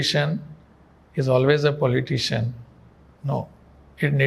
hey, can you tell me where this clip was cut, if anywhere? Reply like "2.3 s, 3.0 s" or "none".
none